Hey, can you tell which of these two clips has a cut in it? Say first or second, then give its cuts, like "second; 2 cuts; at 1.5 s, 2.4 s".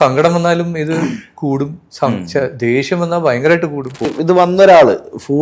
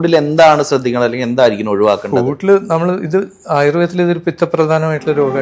first; 1 cut; at 4.1 s